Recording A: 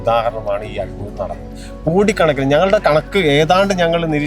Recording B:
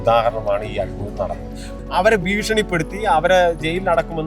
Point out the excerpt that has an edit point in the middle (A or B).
B